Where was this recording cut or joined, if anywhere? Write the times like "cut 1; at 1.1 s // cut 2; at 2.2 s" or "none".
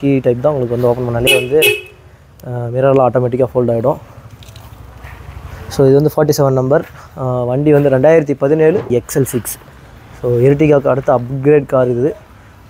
cut 1; at 8.9 s